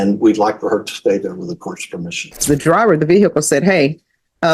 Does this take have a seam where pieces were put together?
yes; 1 cut; at 2.4 s

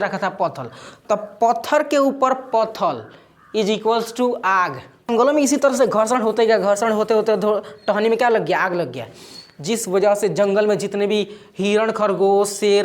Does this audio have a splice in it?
yes; 1 cut; at 5.1 s

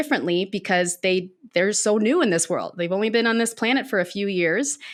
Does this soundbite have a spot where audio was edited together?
no; 0 cuts

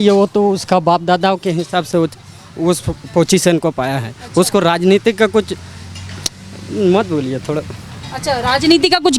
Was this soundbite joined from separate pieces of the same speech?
no; 0 cuts

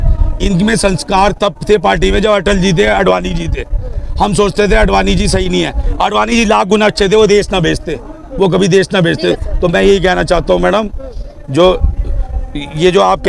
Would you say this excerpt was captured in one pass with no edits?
yes; 0 cuts

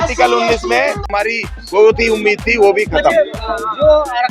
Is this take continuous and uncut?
no; 1 cut; at 1.1 s

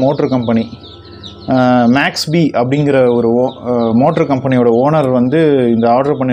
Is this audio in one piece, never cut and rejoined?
yes; 0 cuts

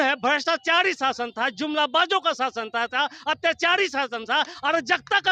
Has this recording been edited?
no; 0 cuts

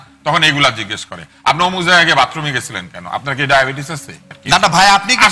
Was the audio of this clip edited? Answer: yes; 1 cut; at 4.3 s

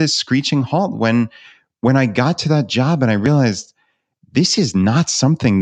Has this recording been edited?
no; 0 cuts

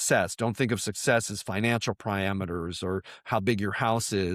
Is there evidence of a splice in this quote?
no; 0 cuts

